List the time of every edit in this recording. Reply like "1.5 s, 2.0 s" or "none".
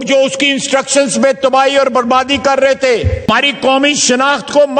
3.3 s